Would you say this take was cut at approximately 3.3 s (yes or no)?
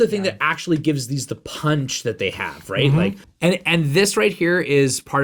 yes